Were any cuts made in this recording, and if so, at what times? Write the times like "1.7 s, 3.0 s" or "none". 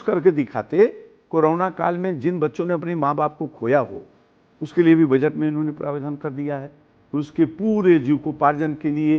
1.1 s